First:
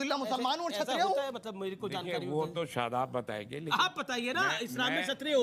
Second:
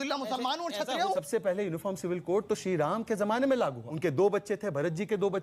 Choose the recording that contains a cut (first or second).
second